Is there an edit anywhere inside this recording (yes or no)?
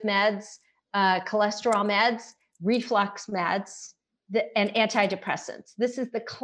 no